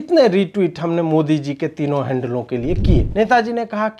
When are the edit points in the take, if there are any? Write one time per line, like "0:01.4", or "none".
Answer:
0:03.1